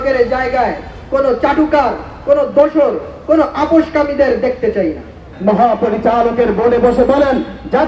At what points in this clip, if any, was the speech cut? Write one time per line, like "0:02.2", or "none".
0:05.3